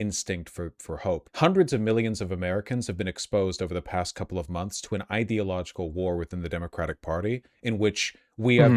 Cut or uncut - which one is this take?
cut